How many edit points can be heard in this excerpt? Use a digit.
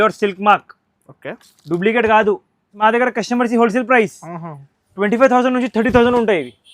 1